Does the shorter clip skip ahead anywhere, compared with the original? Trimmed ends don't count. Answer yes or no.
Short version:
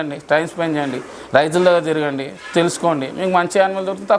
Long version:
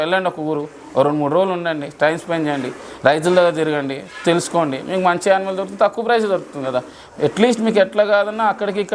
no